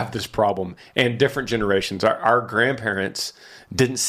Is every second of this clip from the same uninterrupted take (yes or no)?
yes